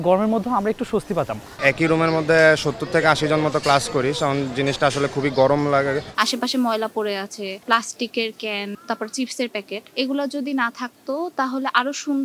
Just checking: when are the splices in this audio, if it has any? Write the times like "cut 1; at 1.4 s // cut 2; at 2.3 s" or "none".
cut 1; at 1.6 s // cut 2; at 6.1 s // cut 3; at 7.6 s // cut 4; at 8.8 s // cut 5; at 9.8 s

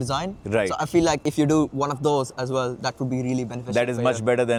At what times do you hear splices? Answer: none

